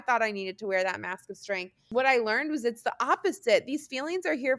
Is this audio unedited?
no; 1 cut; at 1.8 s

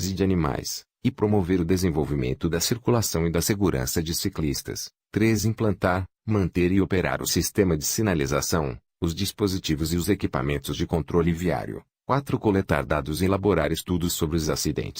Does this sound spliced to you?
yes; 1 cut; at 12.7 s

